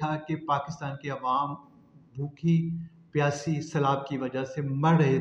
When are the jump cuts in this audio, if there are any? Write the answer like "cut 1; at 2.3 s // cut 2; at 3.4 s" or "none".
none